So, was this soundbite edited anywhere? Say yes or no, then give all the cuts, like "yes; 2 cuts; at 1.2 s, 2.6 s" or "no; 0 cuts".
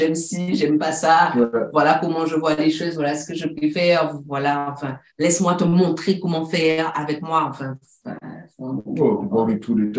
no; 0 cuts